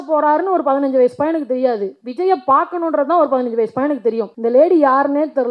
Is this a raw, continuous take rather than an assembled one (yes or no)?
no